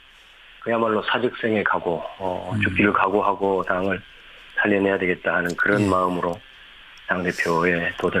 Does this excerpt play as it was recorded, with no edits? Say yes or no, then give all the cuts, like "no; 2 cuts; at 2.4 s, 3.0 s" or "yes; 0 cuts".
yes; 0 cuts